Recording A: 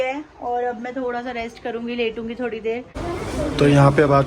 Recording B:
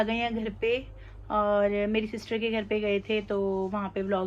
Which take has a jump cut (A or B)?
A